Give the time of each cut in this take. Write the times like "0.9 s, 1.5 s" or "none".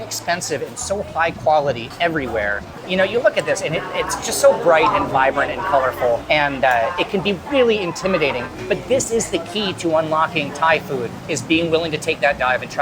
2.8 s, 8.4 s